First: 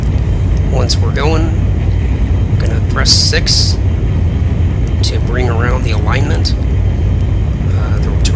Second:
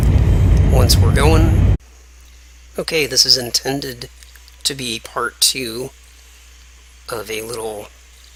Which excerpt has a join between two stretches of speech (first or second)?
first